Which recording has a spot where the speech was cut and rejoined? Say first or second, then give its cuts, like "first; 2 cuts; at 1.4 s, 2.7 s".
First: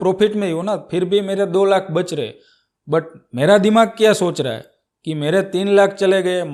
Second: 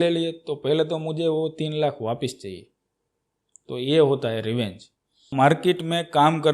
second; 1 cut; at 5.3 s